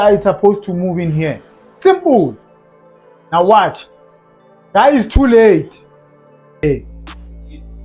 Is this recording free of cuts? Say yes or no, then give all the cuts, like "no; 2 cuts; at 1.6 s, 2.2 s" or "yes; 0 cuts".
no; 1 cut; at 6.6 s